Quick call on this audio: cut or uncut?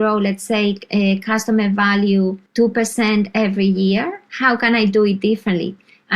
cut